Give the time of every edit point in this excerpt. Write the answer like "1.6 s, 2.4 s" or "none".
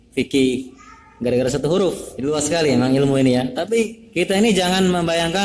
2.1 s, 4.0 s

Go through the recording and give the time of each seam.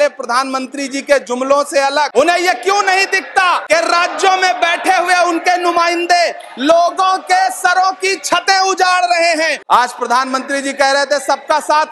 2.1 s, 3.6 s, 9.6 s

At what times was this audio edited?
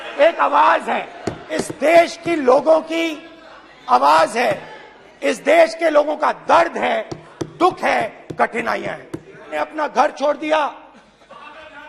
1.6 s, 9.5 s

